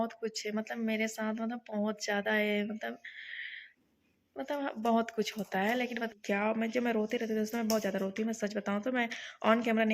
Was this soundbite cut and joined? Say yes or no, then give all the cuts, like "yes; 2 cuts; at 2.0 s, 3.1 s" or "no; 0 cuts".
yes; 1 cut; at 6.1 s